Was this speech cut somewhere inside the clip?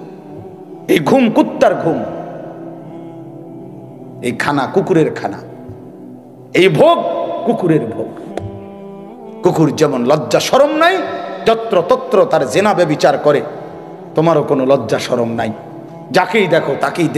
yes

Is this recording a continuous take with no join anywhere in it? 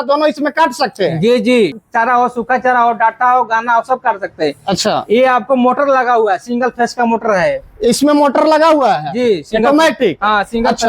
no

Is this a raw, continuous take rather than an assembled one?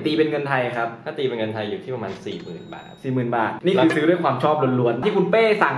no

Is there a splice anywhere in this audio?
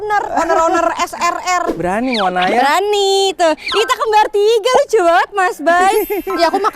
yes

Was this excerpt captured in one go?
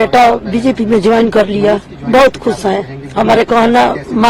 yes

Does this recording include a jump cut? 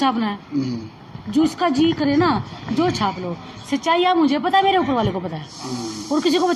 no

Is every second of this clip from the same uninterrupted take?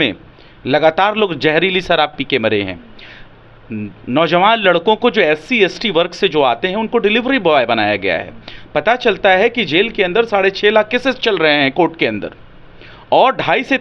yes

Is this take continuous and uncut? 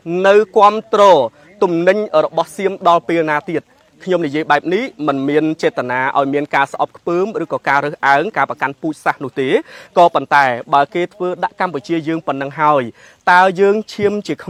yes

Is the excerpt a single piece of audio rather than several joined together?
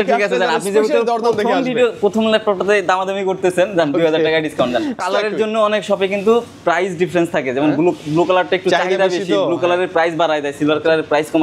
no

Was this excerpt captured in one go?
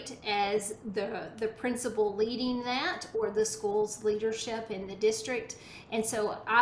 yes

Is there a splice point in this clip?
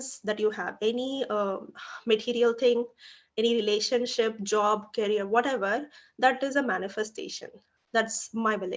no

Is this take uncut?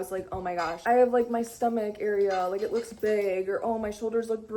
yes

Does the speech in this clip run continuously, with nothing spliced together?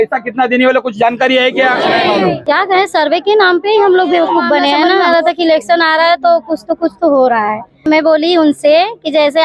no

